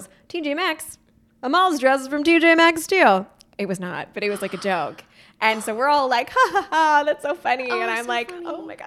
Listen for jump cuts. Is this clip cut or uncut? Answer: uncut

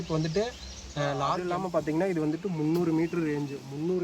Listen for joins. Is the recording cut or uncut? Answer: cut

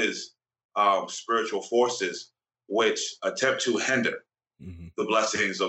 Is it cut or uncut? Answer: uncut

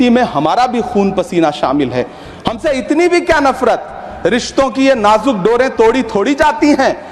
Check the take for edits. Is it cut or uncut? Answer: uncut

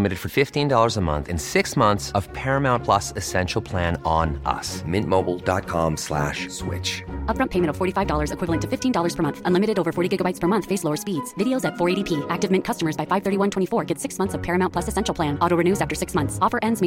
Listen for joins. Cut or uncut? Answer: uncut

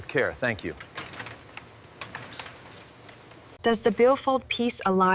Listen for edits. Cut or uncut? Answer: cut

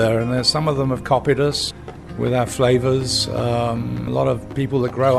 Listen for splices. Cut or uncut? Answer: cut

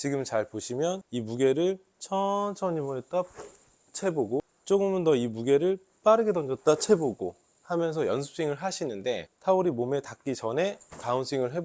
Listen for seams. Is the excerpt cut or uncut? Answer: cut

